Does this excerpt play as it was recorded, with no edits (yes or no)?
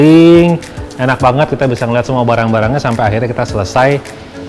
yes